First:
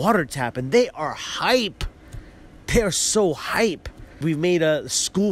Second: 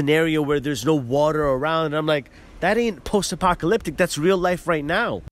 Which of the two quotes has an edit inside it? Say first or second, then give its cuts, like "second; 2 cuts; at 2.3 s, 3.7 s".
first; 1 cut; at 4.2 s